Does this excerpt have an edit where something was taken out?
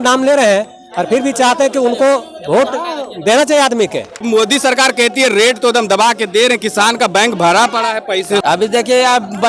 yes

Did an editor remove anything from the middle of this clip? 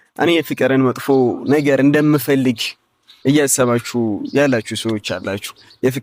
no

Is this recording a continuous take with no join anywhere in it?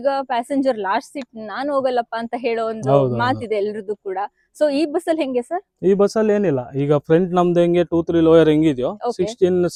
yes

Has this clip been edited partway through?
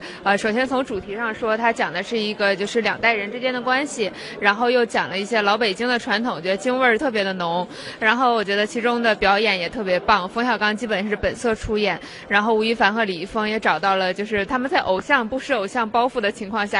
no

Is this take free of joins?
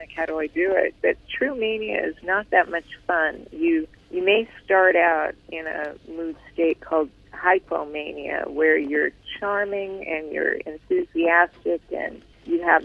yes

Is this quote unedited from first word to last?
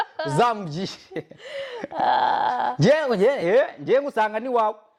yes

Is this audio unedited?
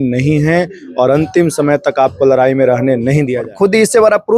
no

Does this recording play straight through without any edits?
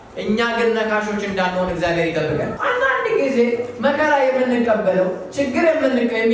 no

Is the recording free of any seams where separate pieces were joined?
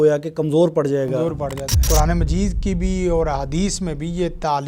no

